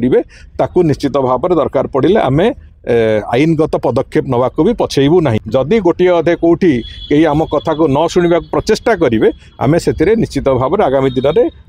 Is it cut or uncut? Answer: cut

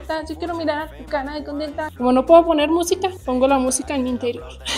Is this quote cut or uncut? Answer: cut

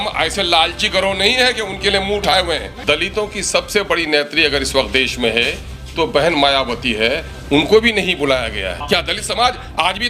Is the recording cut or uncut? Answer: cut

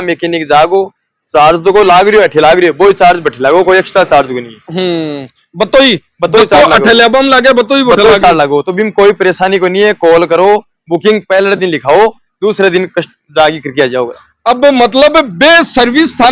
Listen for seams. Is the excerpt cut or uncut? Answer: uncut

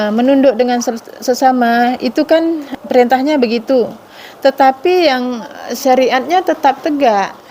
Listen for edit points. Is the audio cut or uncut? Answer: cut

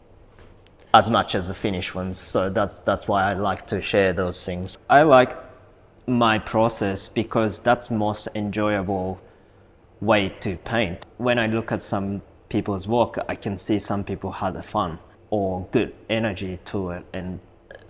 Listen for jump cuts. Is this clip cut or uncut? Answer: cut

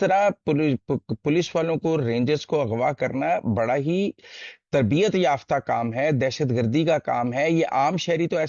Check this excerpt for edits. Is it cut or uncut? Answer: uncut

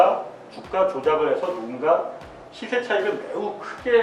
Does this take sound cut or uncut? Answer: uncut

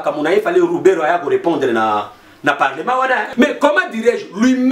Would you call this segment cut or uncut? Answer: cut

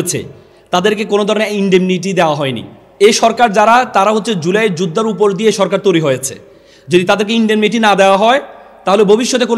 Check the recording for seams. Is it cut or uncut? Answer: cut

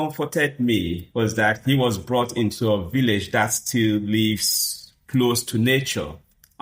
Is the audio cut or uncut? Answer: uncut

